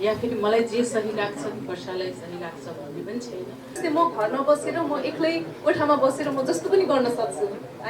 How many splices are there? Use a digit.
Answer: 1